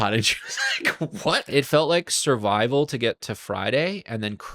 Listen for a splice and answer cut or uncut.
cut